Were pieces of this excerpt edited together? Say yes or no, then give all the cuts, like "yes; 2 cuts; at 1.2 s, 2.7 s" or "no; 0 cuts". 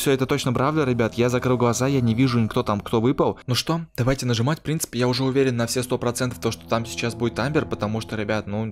yes; 1 cut; at 3.5 s